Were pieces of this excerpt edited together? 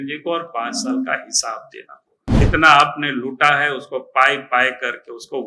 yes; 1 cut; at 2.4 s

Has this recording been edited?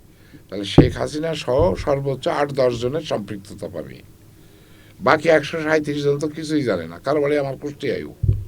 no; 0 cuts

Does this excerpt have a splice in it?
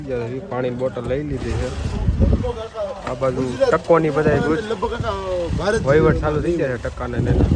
no; 0 cuts

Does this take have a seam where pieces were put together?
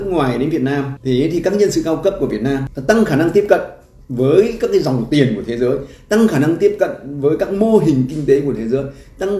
yes; 2 cuts; at 0.9 s, 2.7 s

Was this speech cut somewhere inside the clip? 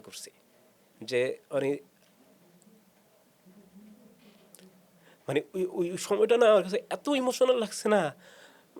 no; 0 cuts

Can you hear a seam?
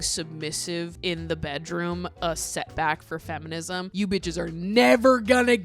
yes; 2 cuts; at 0.9 s, 3.9 s

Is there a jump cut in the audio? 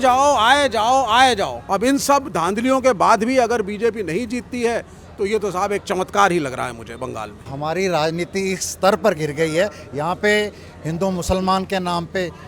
yes; 2 cuts; at 1.6 s, 7.5 s

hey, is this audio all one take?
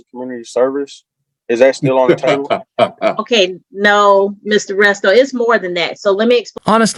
yes; 0 cuts

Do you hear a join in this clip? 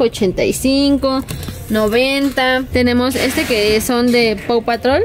yes; 1 cut; at 2.7 s

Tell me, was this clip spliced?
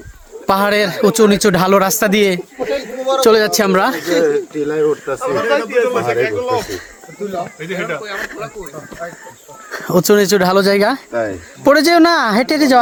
no; 0 cuts

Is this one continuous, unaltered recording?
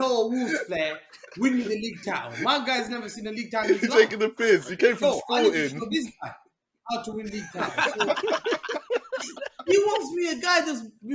yes; 0 cuts

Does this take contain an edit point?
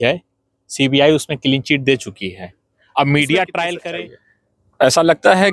yes; 1 cut; at 3.8 s

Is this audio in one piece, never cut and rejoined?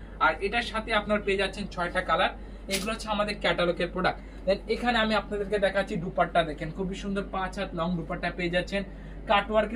yes; 0 cuts

